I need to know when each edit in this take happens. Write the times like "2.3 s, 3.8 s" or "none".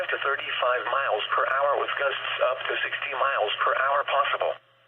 3.1 s